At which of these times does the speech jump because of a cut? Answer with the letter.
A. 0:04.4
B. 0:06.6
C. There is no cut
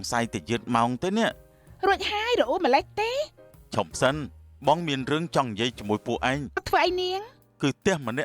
B